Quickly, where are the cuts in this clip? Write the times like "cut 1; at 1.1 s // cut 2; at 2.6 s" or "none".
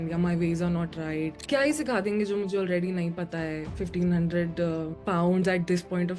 cut 1; at 1.4 s